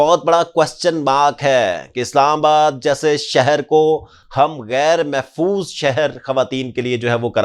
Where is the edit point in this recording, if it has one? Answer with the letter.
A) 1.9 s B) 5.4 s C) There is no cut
C